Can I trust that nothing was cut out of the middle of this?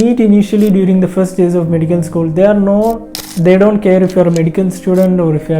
no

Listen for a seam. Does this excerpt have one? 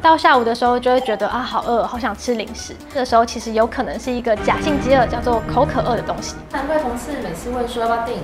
yes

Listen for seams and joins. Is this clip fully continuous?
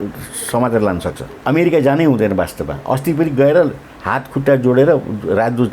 no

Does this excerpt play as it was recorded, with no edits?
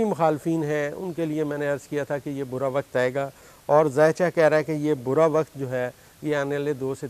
yes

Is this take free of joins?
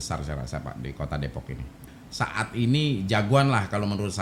no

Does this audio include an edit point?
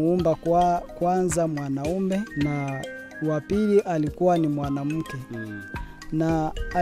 yes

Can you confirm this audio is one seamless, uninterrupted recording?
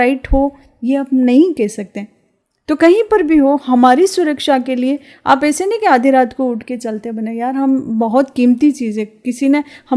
yes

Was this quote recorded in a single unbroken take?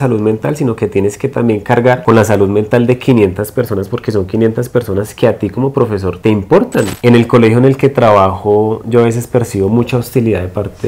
no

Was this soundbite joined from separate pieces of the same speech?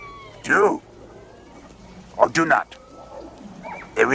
no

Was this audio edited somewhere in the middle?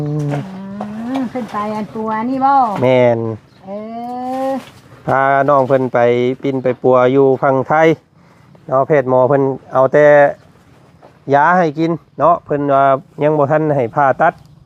no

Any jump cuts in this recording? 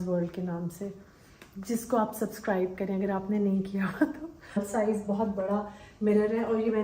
yes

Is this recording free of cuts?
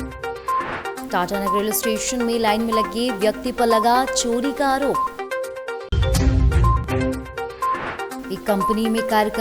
no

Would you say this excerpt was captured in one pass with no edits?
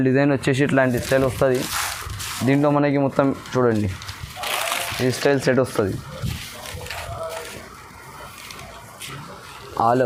yes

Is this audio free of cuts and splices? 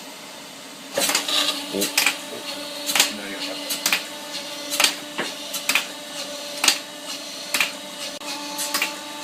no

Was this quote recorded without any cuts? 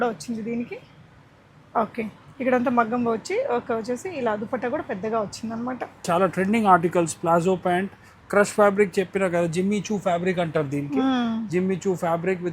no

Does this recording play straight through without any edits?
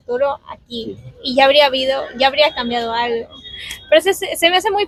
yes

